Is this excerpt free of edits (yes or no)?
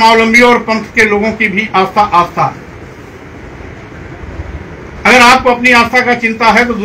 yes